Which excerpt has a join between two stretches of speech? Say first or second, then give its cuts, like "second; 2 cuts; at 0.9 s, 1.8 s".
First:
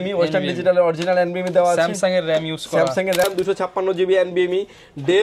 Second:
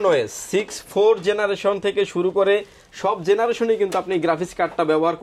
first; 1 cut; at 3.2 s